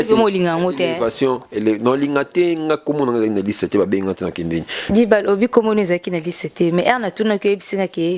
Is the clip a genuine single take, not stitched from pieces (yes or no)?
no